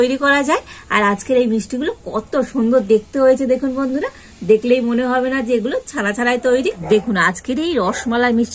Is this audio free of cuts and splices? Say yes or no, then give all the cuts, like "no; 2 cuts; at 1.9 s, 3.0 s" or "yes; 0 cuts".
no; 1 cut; at 6.8 s